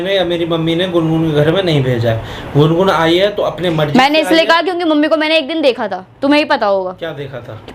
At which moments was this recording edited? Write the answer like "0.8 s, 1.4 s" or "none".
none